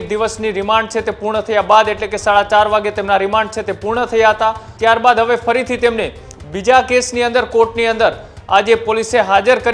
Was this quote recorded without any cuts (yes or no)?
no